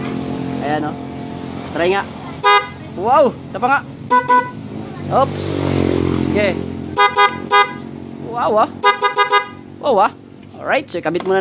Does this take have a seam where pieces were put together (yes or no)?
no